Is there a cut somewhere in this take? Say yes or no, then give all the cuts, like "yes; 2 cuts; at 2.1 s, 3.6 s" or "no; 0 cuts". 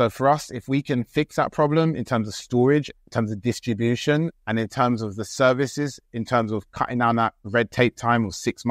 yes; 2 cuts; at 2.9 s, 4.4 s